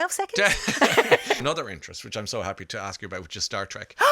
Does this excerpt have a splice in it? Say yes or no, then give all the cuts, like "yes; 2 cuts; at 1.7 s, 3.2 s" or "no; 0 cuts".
yes; 1 cut; at 1.4 s